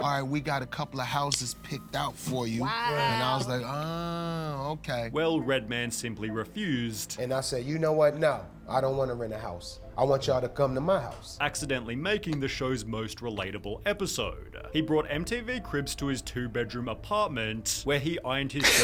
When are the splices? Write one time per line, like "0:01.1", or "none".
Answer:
none